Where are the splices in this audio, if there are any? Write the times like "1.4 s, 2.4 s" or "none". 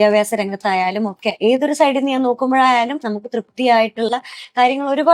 1.3 s